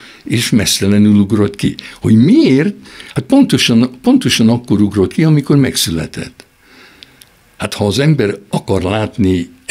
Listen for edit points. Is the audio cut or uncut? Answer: uncut